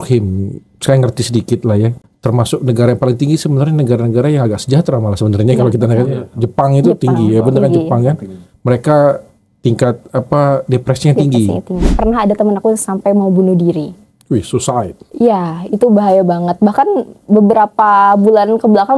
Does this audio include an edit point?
yes; 2 cuts; at 2.0 s, 11.9 s

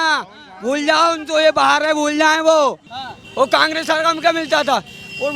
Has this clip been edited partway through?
yes; 1 cut; at 2.9 s

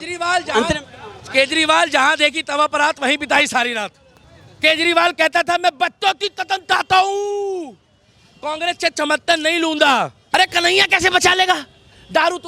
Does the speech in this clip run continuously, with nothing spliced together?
no; 1 cut; at 10.2 s

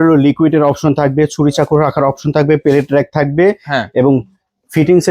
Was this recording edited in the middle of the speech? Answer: no; 0 cuts

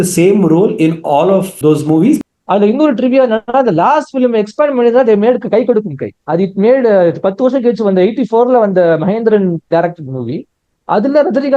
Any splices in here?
yes; 2 cuts; at 1.5 s, 2.2 s

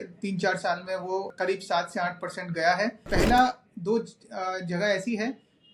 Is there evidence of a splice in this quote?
yes; 2 cuts; at 1.3 s, 3.0 s

